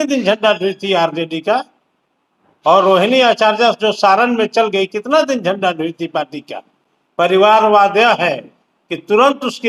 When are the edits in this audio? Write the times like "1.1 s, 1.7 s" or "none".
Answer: none